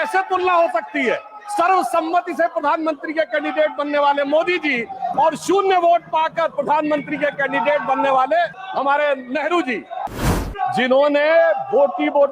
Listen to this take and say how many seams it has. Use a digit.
2